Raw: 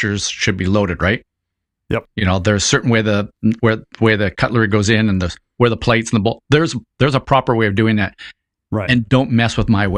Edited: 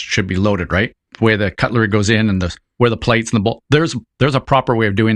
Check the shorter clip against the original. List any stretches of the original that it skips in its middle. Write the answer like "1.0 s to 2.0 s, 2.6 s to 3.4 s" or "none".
1.4 s to 3.9 s